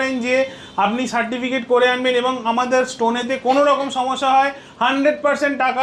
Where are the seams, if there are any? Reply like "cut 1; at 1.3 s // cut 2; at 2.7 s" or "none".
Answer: none